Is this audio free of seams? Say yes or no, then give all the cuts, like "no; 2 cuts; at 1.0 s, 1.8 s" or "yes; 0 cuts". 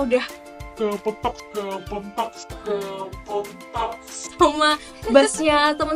yes; 0 cuts